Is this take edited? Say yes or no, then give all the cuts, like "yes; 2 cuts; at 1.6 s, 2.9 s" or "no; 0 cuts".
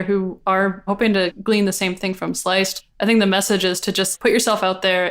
yes; 3 cuts; at 1.0 s, 2.8 s, 4.1 s